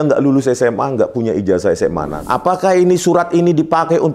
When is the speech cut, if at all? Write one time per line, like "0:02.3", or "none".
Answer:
0:02.1